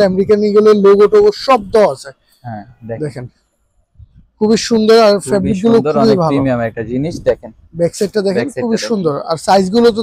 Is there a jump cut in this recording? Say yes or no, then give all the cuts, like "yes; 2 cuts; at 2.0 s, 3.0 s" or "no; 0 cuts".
no; 0 cuts